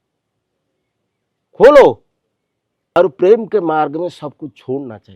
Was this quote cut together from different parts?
yes; 1 cut; at 3.0 s

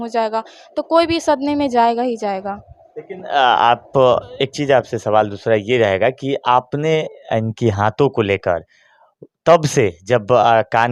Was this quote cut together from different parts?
no; 0 cuts

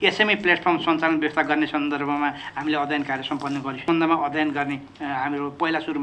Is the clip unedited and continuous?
no; 1 cut; at 3.7 s

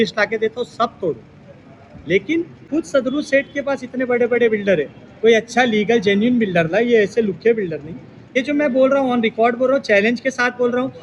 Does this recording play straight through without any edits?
no; 2 cuts; at 2.7 s, 8.4 s

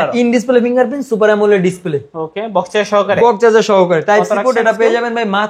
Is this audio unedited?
yes; 0 cuts

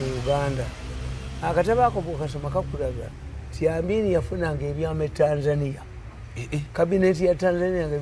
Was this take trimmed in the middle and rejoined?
no; 0 cuts

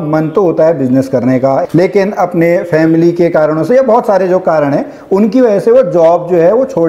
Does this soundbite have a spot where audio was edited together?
yes; 1 cut; at 1.7 s

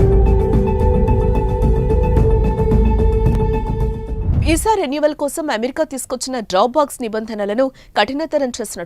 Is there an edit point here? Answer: yes; 1 cut; at 1.5 s

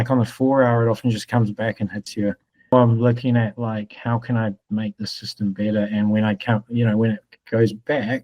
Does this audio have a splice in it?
yes; 1 cut; at 2.7 s

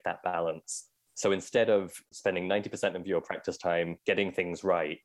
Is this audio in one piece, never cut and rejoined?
no; 2 cuts; at 2.1 s, 3.9 s

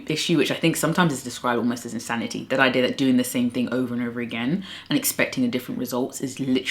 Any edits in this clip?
no; 0 cuts

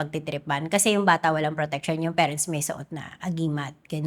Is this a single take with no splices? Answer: yes; 0 cuts

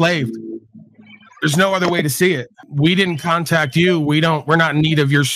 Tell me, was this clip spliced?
yes; 1 cut; at 2.6 s

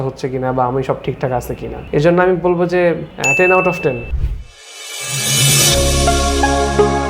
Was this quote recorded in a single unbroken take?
no; 1 cut; at 4.1 s

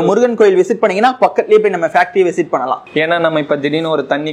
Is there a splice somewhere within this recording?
yes; 1 cut; at 2.8 s

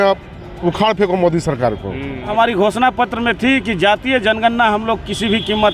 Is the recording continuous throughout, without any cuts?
no; 1 cut; at 2.3 s

